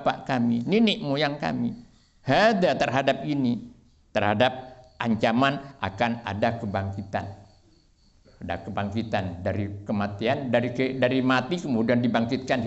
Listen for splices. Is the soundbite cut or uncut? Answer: uncut